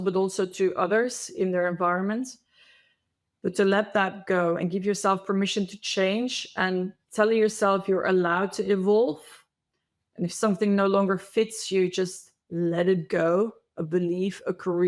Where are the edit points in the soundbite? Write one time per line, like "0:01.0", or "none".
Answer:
none